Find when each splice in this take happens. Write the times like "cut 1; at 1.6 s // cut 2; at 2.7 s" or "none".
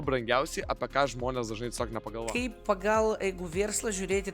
cut 1; at 2.1 s